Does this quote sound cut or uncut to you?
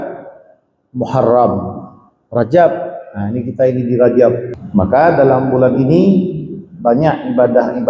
cut